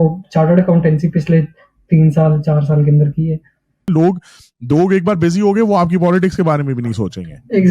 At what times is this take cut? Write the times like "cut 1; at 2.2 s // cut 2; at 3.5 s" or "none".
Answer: cut 1; at 3.9 s